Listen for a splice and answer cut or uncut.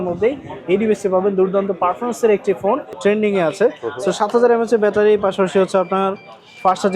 cut